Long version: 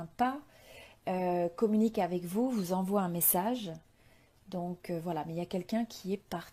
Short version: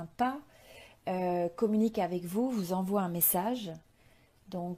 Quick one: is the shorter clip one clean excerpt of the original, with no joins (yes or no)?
yes